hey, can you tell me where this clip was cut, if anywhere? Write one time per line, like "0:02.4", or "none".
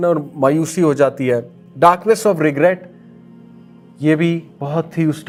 none